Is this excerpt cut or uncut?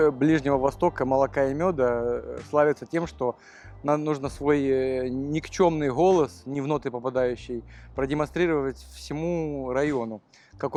uncut